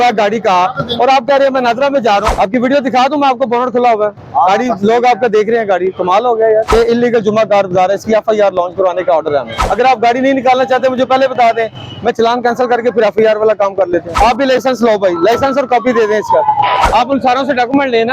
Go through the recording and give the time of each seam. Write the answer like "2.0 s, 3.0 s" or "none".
2.3 s, 6.7 s, 9.6 s, 14.1 s, 16.9 s